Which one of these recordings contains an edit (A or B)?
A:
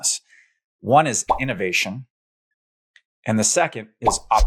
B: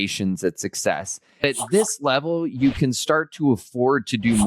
B